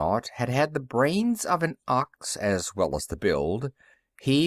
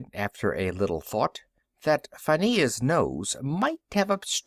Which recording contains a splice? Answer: second; 1 cut; at 1.5 s

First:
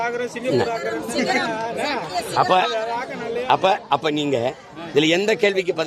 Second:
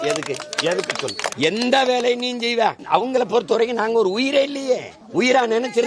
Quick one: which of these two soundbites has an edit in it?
second; 3 cuts; at 1.3 s, 2.8 s, 5.0 s

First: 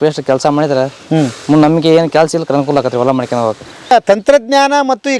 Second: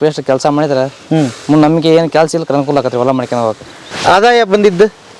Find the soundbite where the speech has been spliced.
second; 1 cut; at 3.9 s

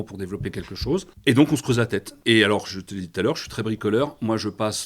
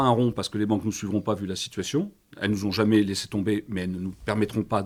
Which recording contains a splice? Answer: first; 2 cuts; at 1.1 s, 2.1 s

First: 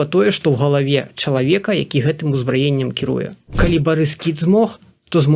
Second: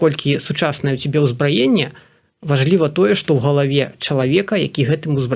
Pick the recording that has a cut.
first; 1 cut; at 3.4 s

